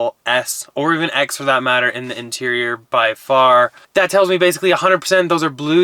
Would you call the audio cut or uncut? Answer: cut